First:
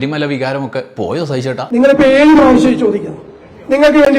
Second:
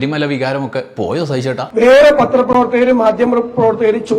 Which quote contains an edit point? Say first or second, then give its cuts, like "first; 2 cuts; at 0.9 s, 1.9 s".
first; 1 cut; at 1.6 s